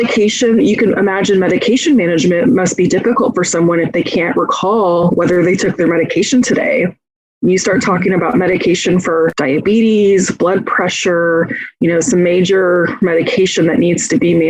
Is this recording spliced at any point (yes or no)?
yes